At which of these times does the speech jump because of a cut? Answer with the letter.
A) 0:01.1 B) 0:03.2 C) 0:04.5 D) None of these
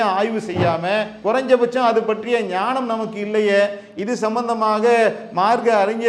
A